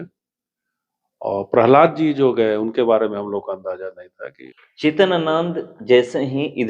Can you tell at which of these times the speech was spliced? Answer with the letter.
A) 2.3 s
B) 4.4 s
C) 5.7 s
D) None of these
B